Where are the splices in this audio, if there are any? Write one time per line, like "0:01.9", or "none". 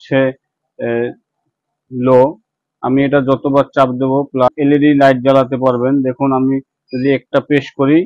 0:04.5